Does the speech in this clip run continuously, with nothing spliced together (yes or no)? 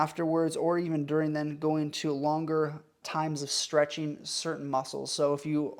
yes